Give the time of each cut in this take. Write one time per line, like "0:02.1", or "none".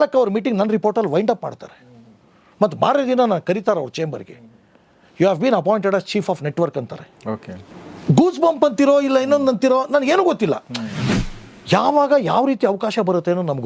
0:10.9